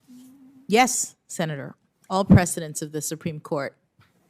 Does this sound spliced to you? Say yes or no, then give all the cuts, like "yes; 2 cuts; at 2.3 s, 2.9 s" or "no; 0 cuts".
no; 0 cuts